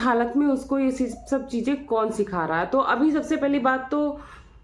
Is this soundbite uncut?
yes; 0 cuts

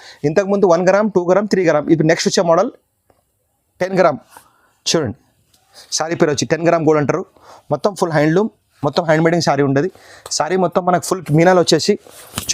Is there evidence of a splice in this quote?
no; 0 cuts

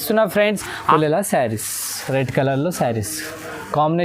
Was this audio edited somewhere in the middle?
yes; 1 cut; at 0.9 s

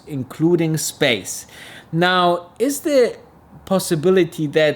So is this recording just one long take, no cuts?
yes; 0 cuts

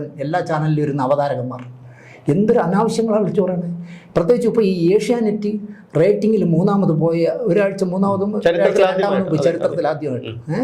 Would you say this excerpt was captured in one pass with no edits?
yes; 0 cuts

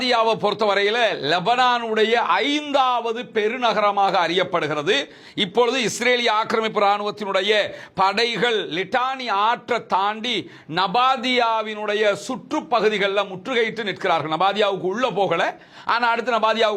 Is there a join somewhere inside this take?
no; 0 cuts

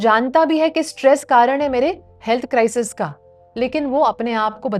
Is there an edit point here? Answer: no; 0 cuts

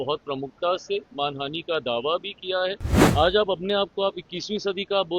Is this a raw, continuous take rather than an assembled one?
no; 1 cut; at 2.9 s

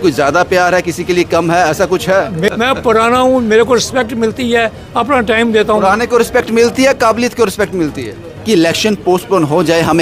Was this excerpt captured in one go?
no; 2 cuts; at 2.5 s, 8.4 s

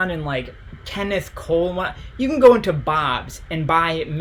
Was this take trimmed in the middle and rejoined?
no; 0 cuts

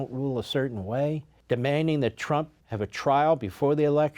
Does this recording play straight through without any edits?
no; 2 cuts; at 1.3 s, 2.6 s

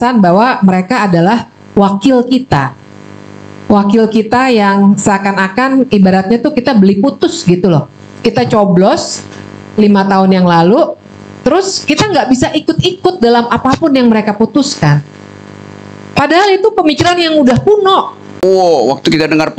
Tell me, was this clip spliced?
yes; 1 cut; at 18.4 s

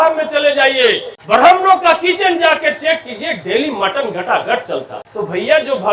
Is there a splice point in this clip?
no; 0 cuts

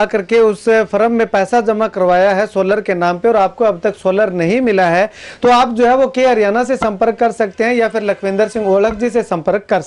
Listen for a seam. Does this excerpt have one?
no; 0 cuts

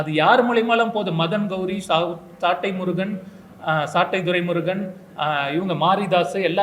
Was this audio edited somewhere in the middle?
no; 0 cuts

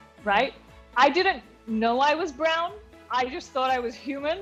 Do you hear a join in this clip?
no; 0 cuts

